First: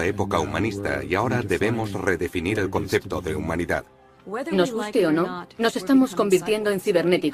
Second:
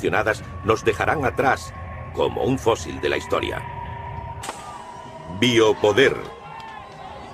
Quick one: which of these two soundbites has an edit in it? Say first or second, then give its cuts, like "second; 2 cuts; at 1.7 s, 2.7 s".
second; 1 cut; at 3.2 s